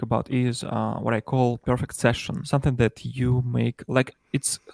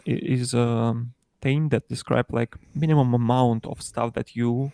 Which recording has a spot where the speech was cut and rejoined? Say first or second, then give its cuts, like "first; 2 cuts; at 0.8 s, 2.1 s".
first; 1 cut; at 2.4 s